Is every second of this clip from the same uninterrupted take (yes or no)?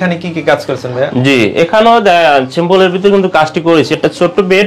yes